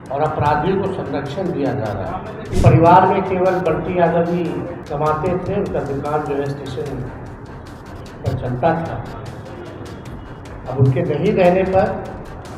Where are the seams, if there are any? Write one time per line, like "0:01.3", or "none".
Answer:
0:02.5
0:04.8